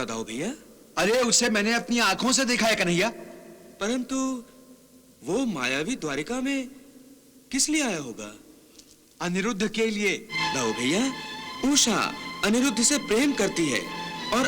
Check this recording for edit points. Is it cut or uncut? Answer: cut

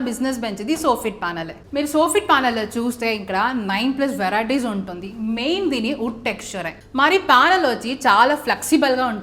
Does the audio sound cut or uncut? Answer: uncut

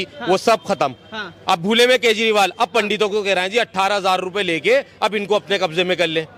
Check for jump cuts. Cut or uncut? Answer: uncut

